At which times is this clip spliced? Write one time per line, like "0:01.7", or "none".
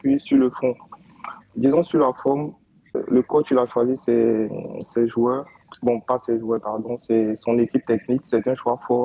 0:01.5
0:03.0